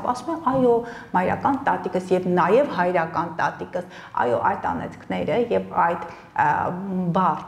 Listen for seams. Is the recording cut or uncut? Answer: uncut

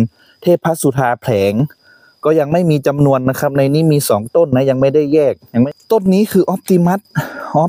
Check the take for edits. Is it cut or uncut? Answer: cut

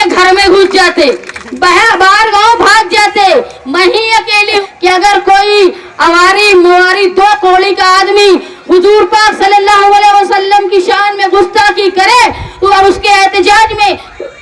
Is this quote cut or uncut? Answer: cut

